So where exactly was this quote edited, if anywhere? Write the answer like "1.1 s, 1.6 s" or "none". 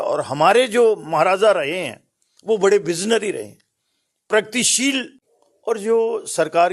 5.1 s

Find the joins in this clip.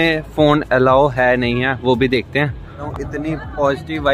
2.9 s

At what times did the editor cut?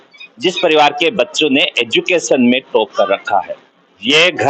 none

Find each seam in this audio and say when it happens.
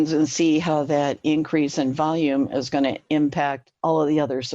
none

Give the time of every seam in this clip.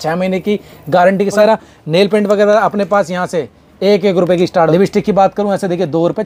1.4 s, 4.7 s

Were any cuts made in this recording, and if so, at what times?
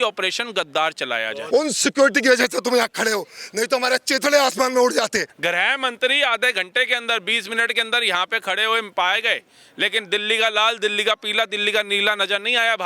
1.4 s, 5.3 s

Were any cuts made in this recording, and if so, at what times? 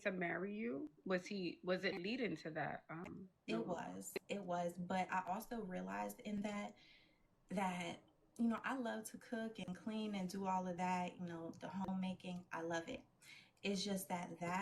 none

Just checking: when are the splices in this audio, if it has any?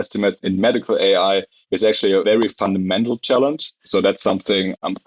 2.2 s, 3.8 s

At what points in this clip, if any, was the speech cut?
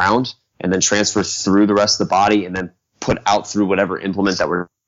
none

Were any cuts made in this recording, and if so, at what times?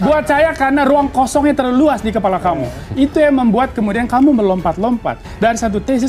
none

